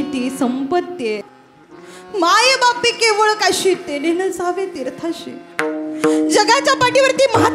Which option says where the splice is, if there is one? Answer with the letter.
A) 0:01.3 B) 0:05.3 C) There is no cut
A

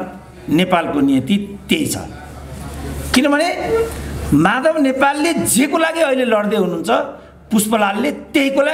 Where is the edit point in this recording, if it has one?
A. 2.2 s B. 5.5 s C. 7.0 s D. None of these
D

